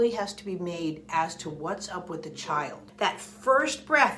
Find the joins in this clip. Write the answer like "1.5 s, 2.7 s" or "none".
2.9 s